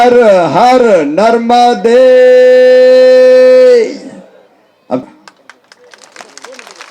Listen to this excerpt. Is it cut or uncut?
cut